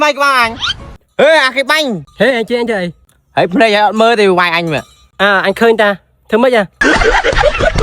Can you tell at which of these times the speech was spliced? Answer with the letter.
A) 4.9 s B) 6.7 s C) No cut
B